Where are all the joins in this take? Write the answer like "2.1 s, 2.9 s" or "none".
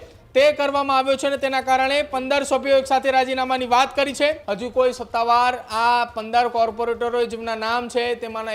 4.5 s